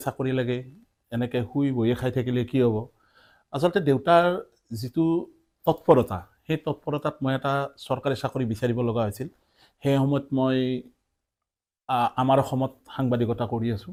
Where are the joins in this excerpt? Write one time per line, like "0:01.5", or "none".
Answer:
none

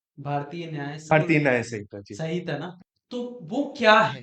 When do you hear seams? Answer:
0:01.1
0:02.7

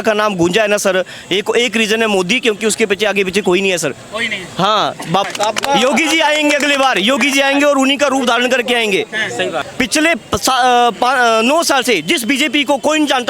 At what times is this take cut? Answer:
0:05.3
0:09.6

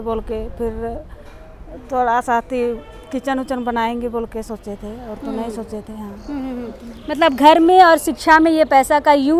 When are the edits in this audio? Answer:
none

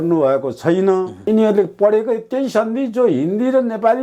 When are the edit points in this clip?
0:01.3

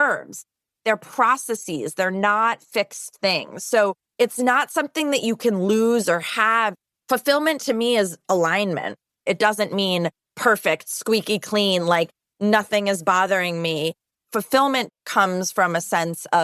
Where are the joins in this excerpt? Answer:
0:04.0
0:09.2
0:14.9

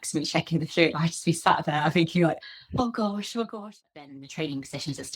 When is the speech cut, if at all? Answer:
0:03.7

